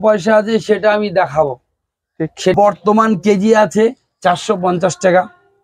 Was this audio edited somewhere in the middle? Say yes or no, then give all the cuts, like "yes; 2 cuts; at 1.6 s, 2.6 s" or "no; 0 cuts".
yes; 1 cut; at 2.5 s